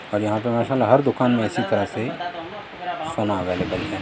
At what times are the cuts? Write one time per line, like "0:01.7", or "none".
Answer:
none